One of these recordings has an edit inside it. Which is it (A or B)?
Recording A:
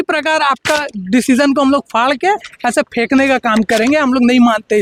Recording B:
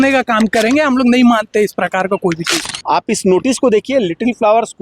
B